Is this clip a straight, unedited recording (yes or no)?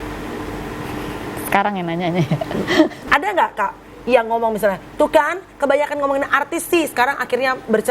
no